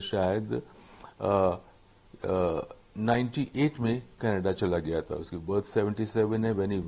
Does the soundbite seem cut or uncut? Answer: uncut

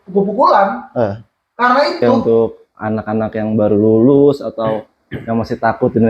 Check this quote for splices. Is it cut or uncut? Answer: cut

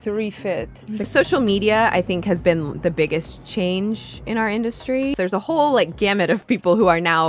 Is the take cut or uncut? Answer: cut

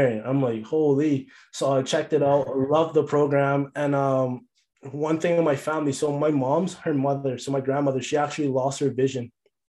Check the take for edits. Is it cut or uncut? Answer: uncut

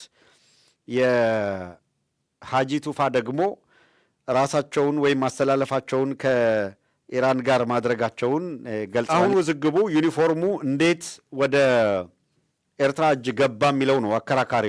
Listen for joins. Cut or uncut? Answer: cut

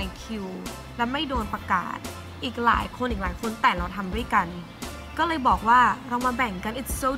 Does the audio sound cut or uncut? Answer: uncut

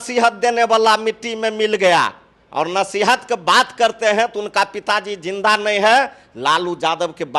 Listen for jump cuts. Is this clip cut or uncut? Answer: uncut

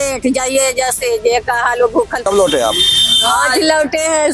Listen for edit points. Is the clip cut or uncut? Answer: cut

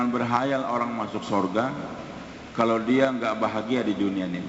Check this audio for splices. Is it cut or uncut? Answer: uncut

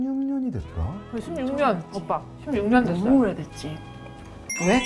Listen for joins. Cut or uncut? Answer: uncut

